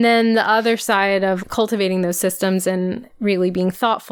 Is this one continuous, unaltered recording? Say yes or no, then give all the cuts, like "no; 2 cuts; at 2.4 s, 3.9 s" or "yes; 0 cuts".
no; 2 cuts; at 1.4 s, 3.1 s